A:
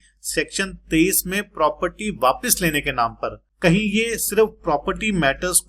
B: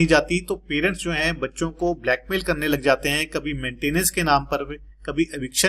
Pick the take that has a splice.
A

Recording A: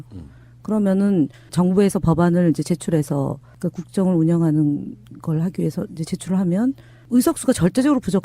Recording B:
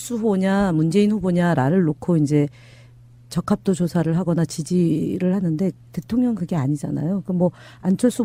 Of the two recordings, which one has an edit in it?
A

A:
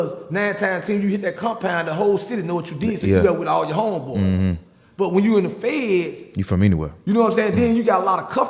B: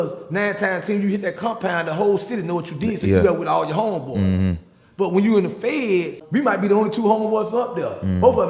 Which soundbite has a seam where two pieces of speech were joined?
B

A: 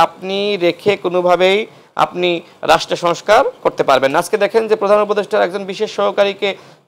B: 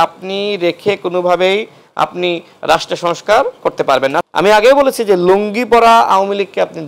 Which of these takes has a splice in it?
B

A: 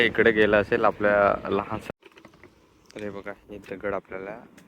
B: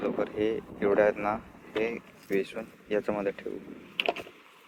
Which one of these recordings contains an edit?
A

